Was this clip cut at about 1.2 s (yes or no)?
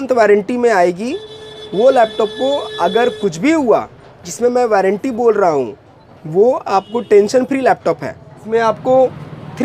no